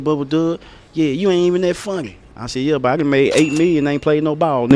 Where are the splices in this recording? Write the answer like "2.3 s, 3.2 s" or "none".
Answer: none